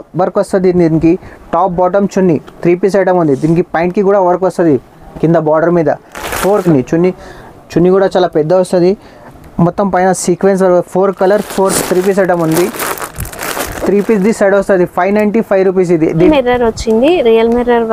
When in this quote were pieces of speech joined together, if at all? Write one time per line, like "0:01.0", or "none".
0:06.7
0:11.8
0:16.3